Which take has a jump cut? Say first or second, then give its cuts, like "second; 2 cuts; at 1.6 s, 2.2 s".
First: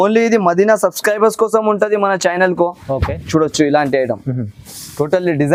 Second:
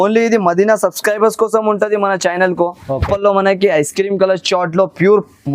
second; 1 cut; at 3.0 s